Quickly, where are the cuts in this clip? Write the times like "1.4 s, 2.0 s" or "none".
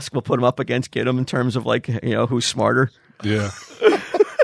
none